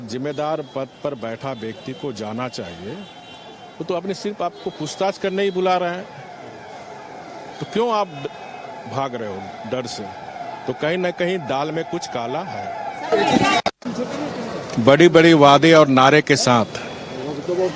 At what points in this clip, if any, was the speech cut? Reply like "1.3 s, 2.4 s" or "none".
none